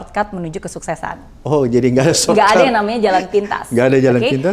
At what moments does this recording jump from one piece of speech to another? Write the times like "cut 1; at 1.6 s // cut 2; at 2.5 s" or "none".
none

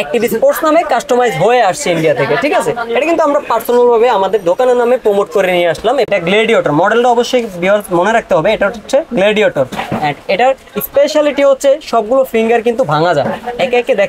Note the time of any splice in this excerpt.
cut 1; at 6.1 s

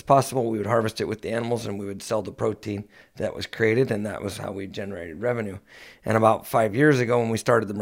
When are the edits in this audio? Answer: none

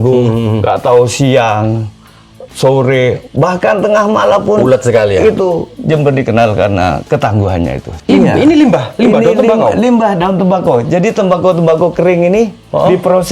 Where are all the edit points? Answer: cut 1; at 8.0 s

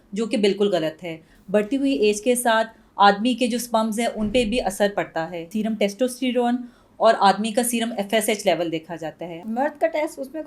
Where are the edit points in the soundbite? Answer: cut 1; at 5.5 s // cut 2; at 9.5 s

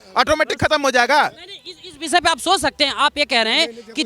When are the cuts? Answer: none

